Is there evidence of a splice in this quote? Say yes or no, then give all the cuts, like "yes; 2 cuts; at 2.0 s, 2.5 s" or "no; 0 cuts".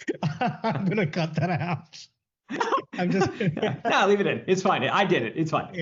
no; 0 cuts